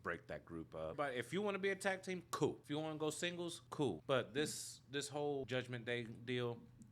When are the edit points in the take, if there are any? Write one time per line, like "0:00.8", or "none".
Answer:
0:00.9
0:02.6
0:03.8
0:05.4